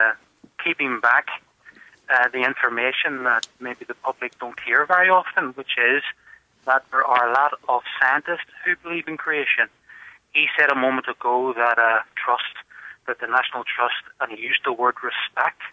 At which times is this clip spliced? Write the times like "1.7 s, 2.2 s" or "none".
12.2 s